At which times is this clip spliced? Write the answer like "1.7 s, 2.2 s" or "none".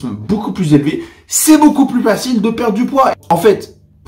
3.1 s